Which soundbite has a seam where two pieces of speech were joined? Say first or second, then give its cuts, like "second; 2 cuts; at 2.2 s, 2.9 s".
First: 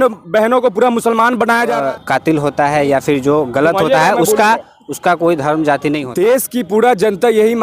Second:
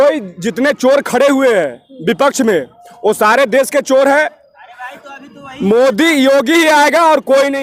first; 2 cuts; at 1.8 s, 6.0 s